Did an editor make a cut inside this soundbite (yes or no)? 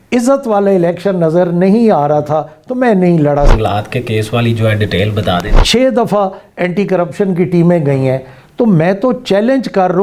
yes